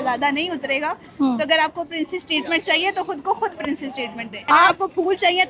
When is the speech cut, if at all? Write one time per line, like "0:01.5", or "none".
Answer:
0:04.3